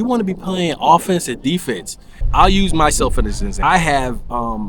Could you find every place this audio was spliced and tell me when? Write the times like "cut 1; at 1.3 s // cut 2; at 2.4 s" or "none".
cut 1; at 2.2 s // cut 2; at 3.5 s